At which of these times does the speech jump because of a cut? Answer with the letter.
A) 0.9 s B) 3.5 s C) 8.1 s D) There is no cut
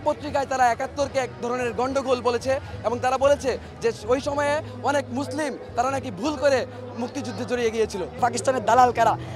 C